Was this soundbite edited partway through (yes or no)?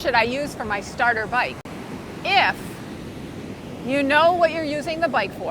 yes